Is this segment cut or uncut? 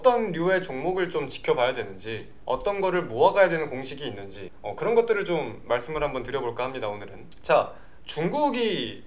uncut